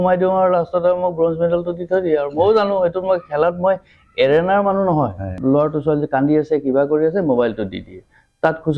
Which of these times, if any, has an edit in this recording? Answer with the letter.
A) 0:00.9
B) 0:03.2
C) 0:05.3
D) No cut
C